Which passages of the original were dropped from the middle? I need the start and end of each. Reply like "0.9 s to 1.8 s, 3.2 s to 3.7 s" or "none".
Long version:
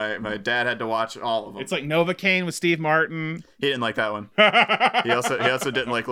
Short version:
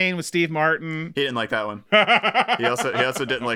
3.3 s to 3.5 s